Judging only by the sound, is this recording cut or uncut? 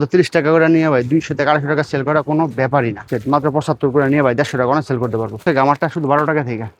cut